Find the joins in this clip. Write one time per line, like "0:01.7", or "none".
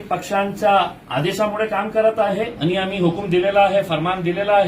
0:02.5

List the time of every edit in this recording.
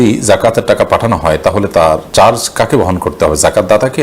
0:02.1

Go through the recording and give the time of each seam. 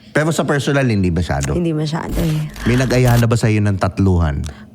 0:02.5

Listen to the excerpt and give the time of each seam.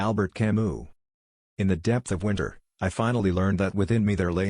0:00.9

